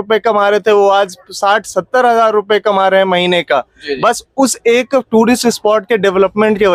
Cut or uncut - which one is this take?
uncut